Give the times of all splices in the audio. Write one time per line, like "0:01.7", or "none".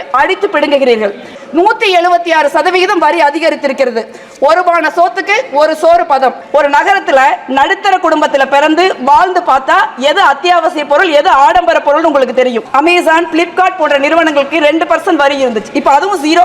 0:01.3
0:06.4
0:12.6